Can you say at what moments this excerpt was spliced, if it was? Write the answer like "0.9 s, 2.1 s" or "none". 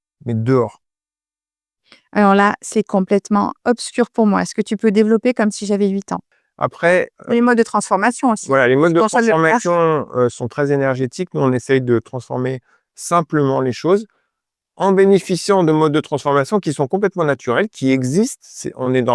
6.2 s